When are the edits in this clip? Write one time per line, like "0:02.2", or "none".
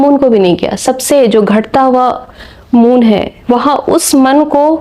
0:03.3